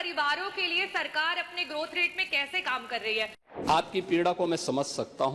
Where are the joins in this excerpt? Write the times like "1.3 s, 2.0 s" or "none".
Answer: 3.4 s